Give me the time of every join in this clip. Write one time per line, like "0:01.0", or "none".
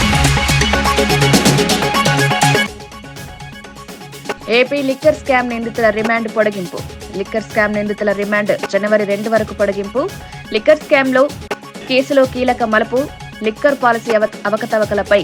none